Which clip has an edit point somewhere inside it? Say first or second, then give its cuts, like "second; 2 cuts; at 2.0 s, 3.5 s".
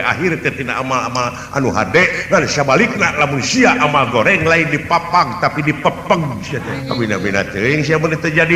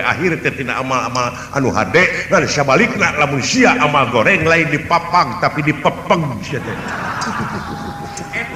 first; 1 cut; at 6.8 s